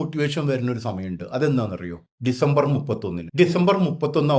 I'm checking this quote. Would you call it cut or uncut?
cut